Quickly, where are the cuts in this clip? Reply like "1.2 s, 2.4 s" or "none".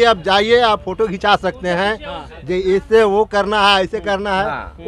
none